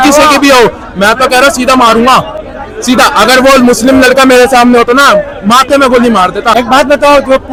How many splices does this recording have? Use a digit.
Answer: 0